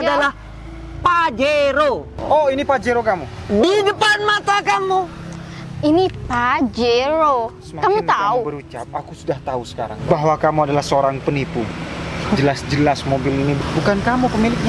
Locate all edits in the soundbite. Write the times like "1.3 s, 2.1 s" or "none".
2.1 s, 13.6 s